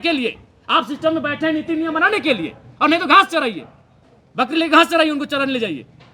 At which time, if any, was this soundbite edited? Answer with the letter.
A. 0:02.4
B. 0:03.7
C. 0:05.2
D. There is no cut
D